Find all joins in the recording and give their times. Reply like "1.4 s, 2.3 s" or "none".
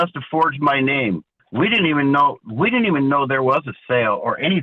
1.3 s